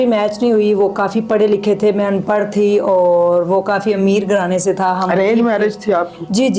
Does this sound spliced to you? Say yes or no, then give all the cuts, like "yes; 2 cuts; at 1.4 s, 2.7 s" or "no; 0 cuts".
no; 0 cuts